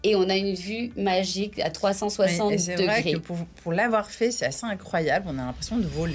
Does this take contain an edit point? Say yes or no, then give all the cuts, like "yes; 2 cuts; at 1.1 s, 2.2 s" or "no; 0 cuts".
no; 0 cuts